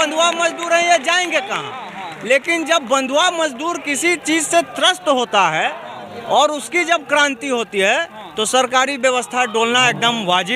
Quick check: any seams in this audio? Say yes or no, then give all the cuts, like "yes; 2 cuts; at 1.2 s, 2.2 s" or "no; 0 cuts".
no; 0 cuts